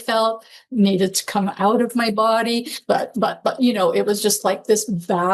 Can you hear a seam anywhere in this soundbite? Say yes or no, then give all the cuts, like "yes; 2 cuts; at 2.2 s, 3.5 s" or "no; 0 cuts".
no; 0 cuts